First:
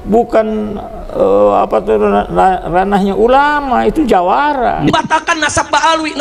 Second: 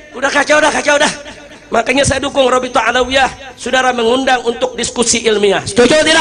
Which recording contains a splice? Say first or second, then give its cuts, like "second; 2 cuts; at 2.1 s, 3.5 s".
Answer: first; 1 cut; at 4.9 s